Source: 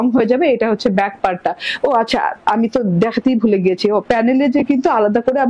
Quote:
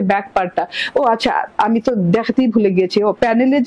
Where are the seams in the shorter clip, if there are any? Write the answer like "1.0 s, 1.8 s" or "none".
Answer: none